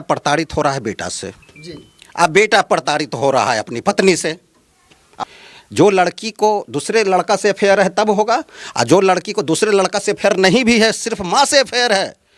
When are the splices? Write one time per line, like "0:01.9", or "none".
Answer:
0:05.2